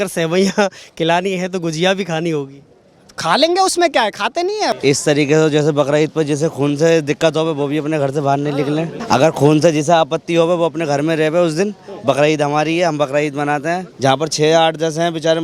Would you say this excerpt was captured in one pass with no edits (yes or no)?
no